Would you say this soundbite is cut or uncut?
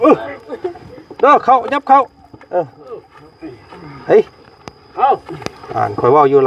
uncut